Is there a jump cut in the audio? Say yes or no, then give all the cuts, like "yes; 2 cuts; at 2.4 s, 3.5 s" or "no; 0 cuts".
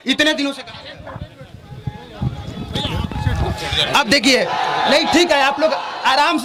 no; 0 cuts